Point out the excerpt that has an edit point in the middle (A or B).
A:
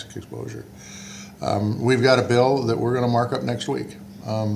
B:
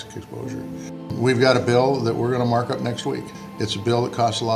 B